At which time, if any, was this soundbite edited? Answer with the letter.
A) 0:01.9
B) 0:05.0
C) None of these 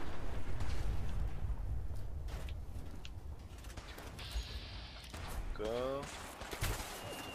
B